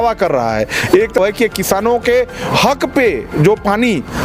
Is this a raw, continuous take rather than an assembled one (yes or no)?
no